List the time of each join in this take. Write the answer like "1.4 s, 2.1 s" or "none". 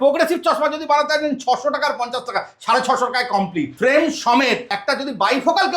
3.7 s, 4.7 s